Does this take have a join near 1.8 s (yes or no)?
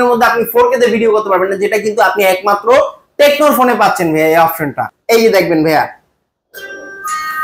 no